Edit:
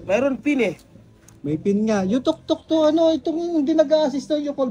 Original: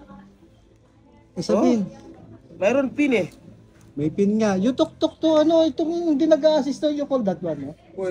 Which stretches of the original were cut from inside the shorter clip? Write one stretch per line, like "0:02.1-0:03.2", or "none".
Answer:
none